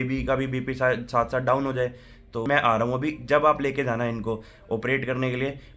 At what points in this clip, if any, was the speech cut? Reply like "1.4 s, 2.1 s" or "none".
2.5 s